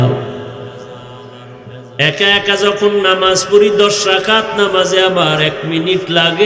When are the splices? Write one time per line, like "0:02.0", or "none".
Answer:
none

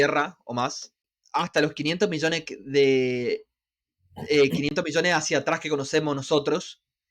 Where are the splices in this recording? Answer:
0:01.1

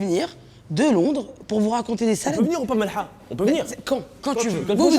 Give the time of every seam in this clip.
0:02.5

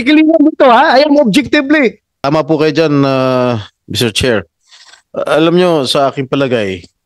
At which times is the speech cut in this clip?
0:02.1

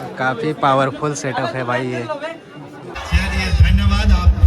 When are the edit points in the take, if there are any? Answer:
0:02.9

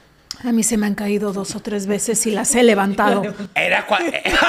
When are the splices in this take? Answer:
none

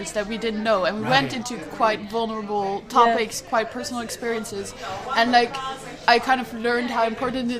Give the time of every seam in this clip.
none

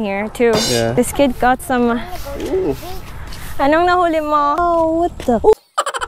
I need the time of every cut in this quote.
0:00.9
0:04.6

